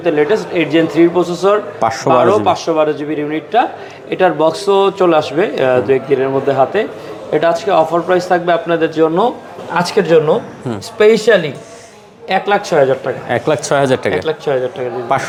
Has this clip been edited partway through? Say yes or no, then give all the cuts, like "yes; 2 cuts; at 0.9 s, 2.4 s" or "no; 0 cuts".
no; 0 cuts